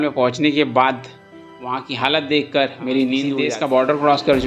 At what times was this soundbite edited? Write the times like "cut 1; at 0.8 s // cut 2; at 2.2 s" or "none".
cut 1; at 3.3 s